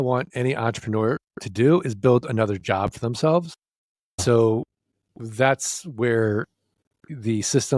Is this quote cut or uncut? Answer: cut